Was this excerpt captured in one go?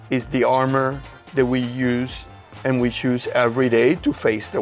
yes; 0 cuts

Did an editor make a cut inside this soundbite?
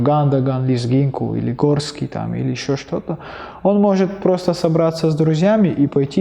no; 0 cuts

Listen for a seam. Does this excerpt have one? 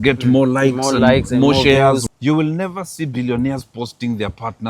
yes; 1 cut; at 2.0 s

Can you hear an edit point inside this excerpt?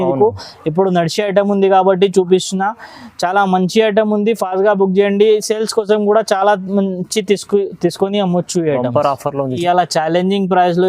yes; 1 cut; at 9.6 s

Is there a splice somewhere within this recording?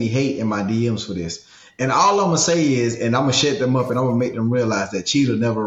no; 0 cuts

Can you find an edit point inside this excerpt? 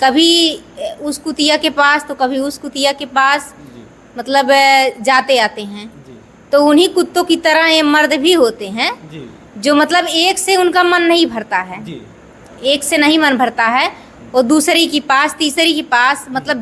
no; 0 cuts

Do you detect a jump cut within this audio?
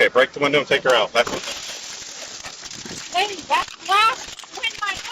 yes; 1 cut; at 2.6 s

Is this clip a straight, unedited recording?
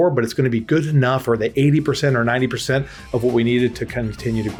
yes; 0 cuts

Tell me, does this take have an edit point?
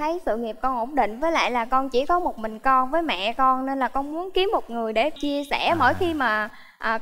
yes; 1 cut; at 5.2 s

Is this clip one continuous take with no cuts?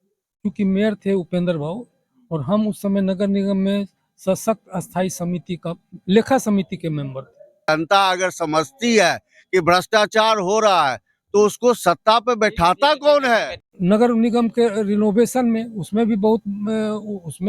no; 2 cuts; at 7.6 s, 13.6 s

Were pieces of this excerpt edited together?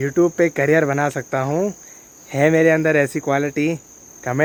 no; 0 cuts

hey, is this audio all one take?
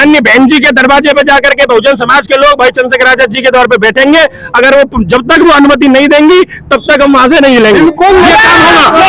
yes; 0 cuts

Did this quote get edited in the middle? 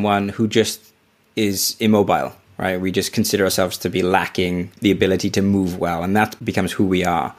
yes; 2 cuts; at 4.7 s, 6.4 s

